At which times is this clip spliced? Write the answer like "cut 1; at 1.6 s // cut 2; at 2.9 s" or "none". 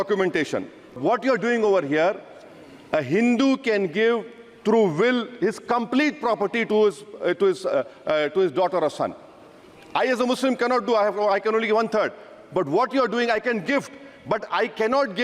cut 1; at 1.0 s